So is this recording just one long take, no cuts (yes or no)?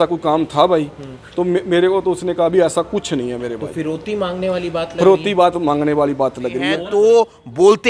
no